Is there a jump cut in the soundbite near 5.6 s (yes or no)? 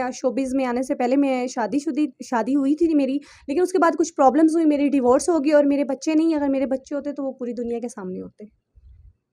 no